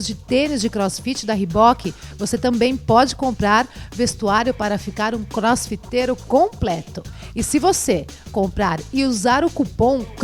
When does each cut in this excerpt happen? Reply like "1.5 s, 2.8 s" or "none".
none